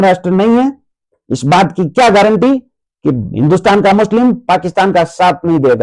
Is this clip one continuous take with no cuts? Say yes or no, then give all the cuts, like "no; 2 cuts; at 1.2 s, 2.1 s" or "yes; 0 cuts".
yes; 0 cuts